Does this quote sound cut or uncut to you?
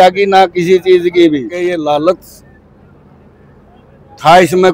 cut